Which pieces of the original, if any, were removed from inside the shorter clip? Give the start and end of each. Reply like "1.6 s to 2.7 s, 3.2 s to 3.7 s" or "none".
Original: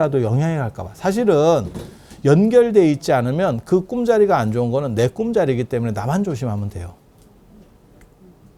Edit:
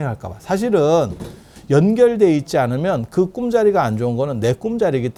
none